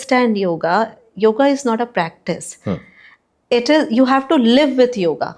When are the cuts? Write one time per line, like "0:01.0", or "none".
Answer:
none